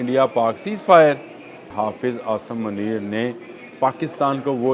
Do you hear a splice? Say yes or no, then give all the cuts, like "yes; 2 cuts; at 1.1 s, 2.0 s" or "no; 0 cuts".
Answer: yes; 1 cut; at 1.7 s